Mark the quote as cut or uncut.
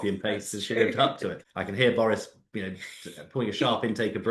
cut